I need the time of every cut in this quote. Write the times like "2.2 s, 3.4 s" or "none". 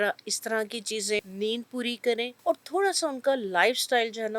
1.2 s, 2.3 s